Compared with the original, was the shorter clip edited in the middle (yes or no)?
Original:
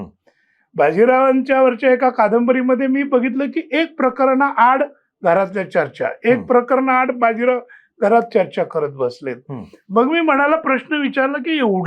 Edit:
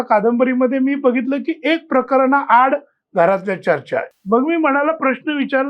yes